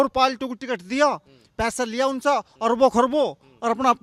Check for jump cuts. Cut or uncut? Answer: uncut